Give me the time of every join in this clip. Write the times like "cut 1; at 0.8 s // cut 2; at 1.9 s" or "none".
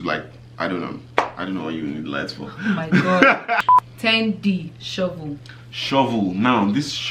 cut 1; at 3.9 s